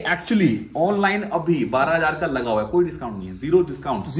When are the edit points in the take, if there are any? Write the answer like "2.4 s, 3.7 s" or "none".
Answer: none